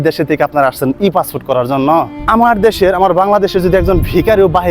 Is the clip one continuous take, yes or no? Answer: no